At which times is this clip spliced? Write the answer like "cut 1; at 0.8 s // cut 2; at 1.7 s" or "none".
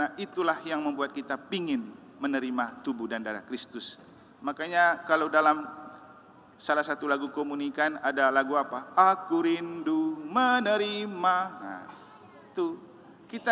none